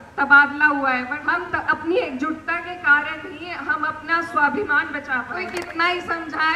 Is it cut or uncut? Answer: cut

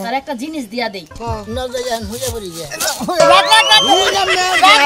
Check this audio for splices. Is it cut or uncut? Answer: cut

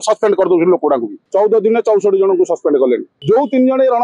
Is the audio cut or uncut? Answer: cut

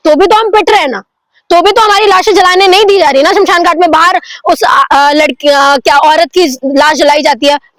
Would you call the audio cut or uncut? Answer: uncut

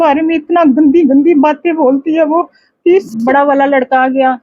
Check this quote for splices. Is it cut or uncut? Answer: cut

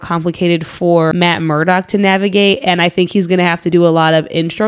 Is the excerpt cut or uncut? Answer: cut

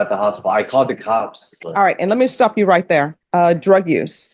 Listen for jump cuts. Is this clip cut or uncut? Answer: cut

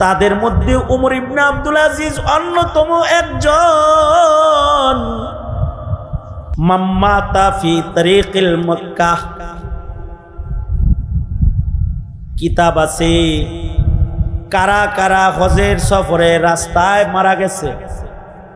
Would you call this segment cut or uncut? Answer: cut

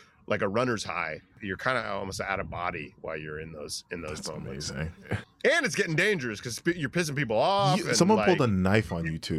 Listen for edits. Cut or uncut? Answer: cut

